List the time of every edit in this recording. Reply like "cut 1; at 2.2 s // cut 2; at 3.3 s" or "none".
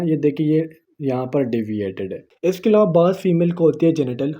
cut 1; at 2.3 s